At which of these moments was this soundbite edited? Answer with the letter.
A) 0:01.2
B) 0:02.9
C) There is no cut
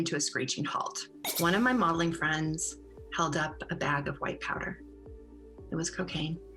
A